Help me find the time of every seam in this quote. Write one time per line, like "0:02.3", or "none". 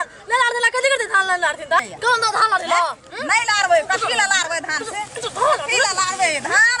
0:01.8